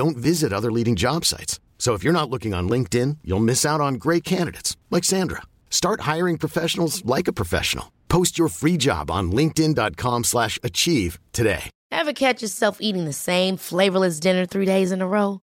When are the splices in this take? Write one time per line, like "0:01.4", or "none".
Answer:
0:11.7